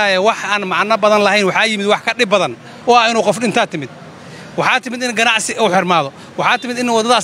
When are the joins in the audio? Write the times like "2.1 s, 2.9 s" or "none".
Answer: none